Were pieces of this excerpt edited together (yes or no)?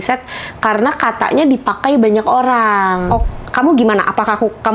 yes